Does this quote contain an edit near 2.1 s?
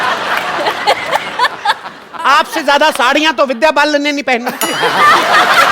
yes; 1 cut; at 2.1 s

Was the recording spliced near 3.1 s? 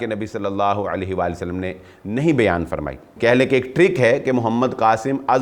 yes; 1 cut; at 3.1 s

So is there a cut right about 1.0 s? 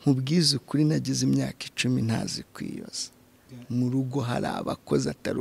no; 0 cuts

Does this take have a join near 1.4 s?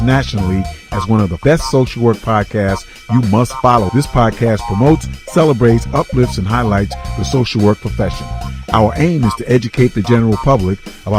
yes; 1 cut; at 1.4 s

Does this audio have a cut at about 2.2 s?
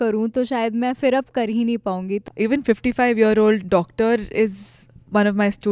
yes; 1 cut; at 2.2 s

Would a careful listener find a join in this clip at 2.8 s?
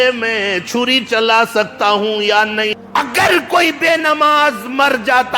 yes; 1 cut; at 2.8 s

